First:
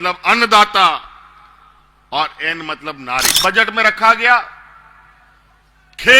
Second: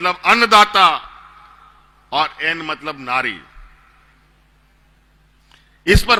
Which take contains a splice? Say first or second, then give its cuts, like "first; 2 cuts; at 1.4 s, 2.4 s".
first; 1 cut; at 3.3 s